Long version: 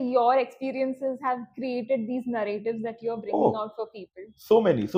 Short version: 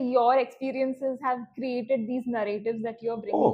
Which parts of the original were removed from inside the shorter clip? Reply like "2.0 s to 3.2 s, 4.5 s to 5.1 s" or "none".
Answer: none